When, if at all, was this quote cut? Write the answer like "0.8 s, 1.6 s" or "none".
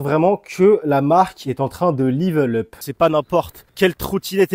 2.7 s, 3.6 s